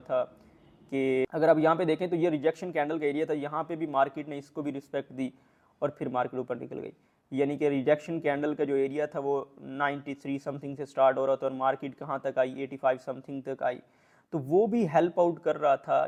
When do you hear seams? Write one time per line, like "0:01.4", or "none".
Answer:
none